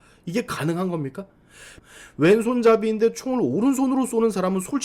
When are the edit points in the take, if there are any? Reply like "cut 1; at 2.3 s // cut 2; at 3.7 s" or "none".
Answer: cut 1; at 1.7 s